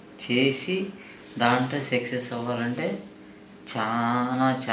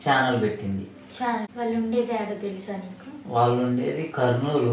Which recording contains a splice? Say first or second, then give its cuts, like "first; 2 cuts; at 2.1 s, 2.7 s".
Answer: second; 1 cut; at 1.5 s